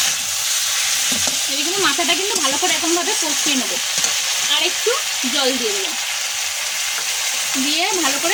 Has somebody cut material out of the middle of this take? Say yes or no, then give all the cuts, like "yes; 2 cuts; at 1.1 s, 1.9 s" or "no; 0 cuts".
no; 0 cuts